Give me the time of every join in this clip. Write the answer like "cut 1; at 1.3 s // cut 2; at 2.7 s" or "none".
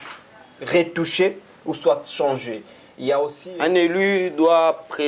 cut 1; at 3.5 s

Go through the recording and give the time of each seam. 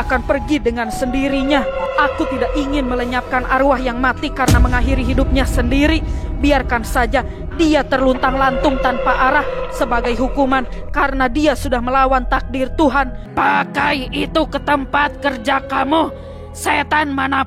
cut 1; at 1.8 s // cut 2; at 13.3 s

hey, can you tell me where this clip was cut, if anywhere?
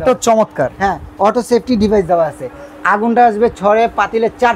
none

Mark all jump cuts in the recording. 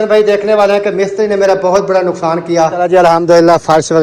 cut 1; at 2.7 s

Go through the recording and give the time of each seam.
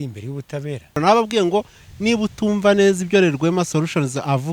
cut 1; at 1.0 s

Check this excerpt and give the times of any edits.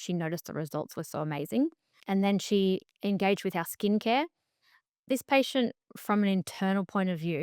cut 1; at 2.0 s

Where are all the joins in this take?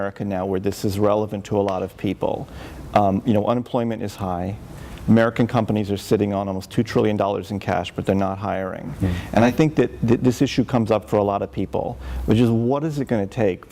none

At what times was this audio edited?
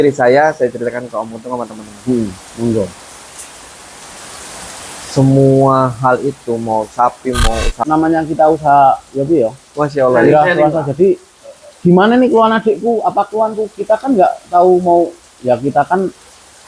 cut 1; at 7.7 s

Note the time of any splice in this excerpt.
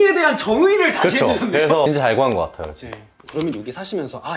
cut 1; at 1.9 s

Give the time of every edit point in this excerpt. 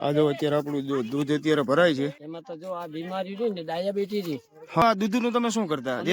cut 1; at 2.2 s // cut 2; at 4.8 s

